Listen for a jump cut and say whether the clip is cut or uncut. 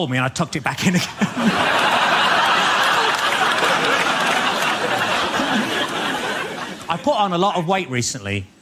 cut